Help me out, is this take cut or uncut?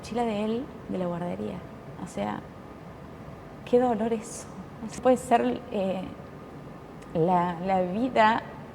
cut